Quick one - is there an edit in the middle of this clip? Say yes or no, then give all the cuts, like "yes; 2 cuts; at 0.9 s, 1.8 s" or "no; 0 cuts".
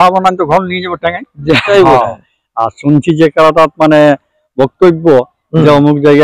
yes; 1 cut; at 1.7 s